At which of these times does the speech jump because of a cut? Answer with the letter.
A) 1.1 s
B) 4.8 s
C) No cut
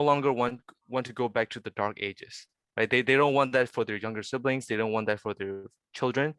C